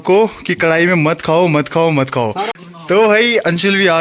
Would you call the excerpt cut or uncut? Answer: cut